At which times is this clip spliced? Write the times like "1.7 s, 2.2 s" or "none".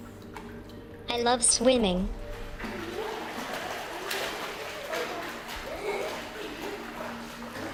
none

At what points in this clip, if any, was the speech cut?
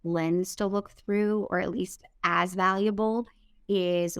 none

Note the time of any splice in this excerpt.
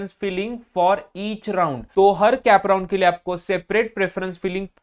1.8 s

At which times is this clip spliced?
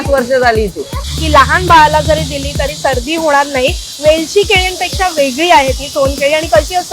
1.0 s

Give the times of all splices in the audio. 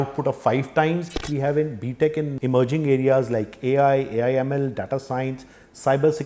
1.3 s, 2.3 s

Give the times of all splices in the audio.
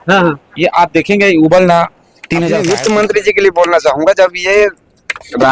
2.5 s

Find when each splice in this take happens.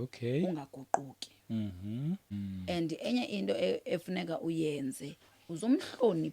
2.3 s

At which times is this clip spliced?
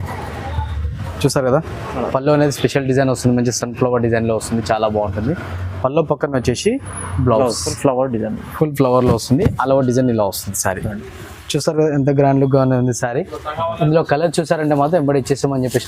7.7 s

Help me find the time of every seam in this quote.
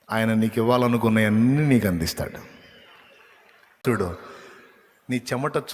3.8 s

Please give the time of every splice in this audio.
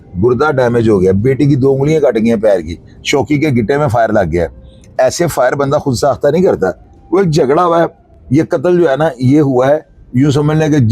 none

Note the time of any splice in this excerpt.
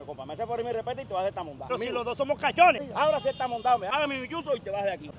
none

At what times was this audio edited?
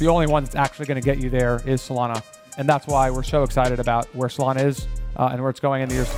none

